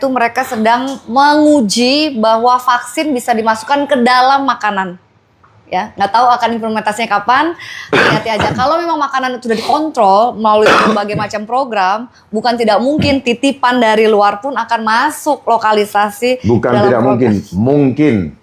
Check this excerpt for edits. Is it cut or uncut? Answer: uncut